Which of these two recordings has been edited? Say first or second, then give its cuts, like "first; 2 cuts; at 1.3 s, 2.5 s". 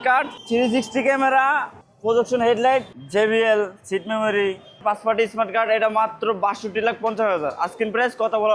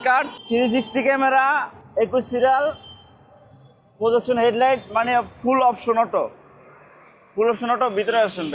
first; 3 cuts; at 1.8 s, 2.9 s, 4.8 s